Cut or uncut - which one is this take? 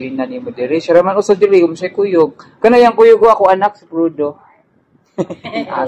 uncut